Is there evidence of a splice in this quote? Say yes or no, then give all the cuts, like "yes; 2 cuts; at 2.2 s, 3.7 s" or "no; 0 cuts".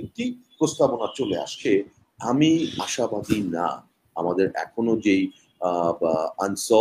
yes; 1 cut; at 1.6 s